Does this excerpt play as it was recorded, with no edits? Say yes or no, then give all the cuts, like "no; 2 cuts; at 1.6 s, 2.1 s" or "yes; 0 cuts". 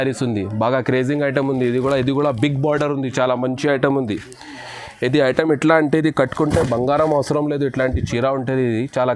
yes; 0 cuts